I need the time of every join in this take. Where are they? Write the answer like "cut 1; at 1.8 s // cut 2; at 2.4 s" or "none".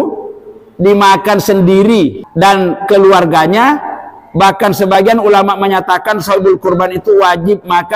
cut 1; at 2.2 s

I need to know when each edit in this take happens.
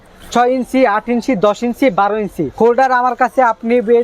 cut 1; at 2.4 s

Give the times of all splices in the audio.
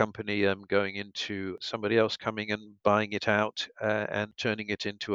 cut 1; at 1.6 s // cut 2; at 4.3 s

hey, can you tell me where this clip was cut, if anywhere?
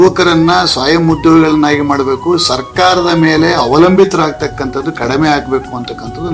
none

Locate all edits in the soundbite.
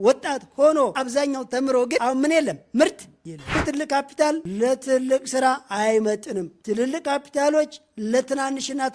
cut 1; at 1.0 s // cut 2; at 2.0 s // cut 3; at 3.6 s

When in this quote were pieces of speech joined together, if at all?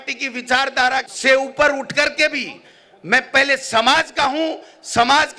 cut 1; at 1.1 s

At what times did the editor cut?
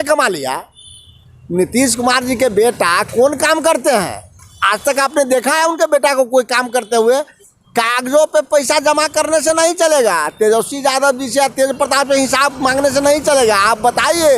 cut 1; at 7.4 s

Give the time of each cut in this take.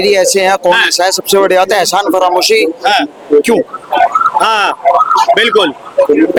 none

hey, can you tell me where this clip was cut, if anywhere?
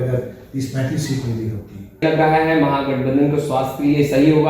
cut 1; at 2.0 s

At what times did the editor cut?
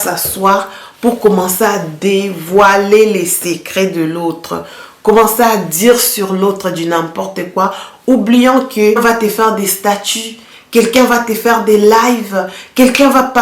cut 1; at 9.0 s

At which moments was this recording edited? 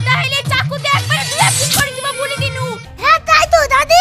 cut 1; at 2.9 s

